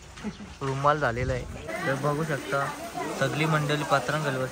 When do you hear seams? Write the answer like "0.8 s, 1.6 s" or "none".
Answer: 1.7 s